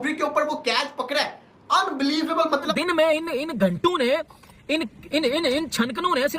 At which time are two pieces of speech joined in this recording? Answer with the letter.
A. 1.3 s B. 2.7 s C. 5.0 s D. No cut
B